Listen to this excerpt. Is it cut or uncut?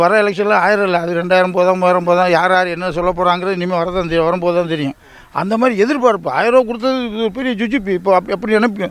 uncut